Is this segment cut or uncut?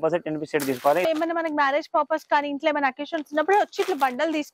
cut